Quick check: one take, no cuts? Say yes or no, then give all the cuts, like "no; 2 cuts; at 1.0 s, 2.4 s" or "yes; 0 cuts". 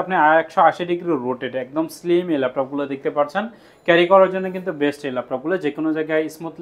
yes; 0 cuts